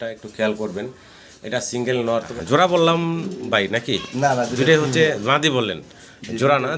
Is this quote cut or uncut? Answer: cut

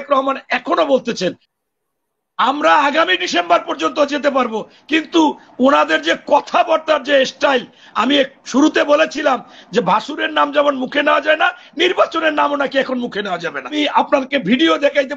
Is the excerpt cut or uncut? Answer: cut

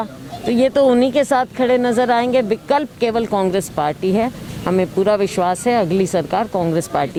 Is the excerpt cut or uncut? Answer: uncut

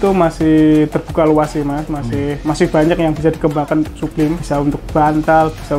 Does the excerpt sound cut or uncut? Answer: uncut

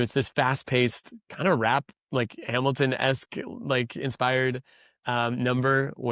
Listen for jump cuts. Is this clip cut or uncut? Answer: uncut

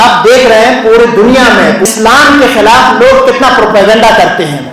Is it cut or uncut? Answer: cut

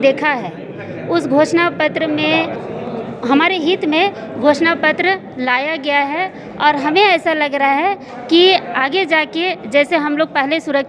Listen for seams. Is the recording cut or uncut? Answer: cut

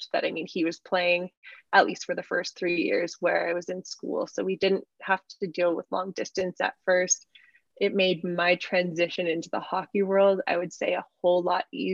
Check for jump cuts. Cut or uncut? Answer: uncut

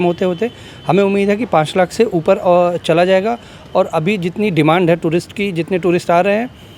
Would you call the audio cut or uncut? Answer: uncut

